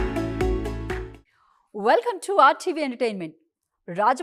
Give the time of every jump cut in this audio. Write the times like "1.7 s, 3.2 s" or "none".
1.2 s